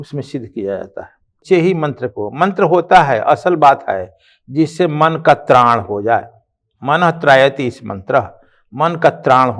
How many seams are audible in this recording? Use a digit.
1